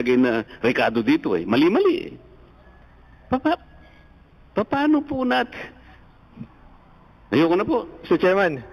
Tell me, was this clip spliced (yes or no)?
no